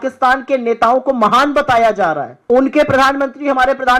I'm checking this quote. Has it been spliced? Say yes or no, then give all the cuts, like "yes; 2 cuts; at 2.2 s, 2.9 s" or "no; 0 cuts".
yes; 1 cut; at 2.3 s